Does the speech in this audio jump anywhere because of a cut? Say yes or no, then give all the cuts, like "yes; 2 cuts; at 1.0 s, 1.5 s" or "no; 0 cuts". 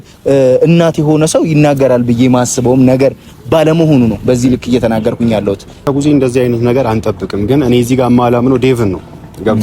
yes; 1 cut; at 5.9 s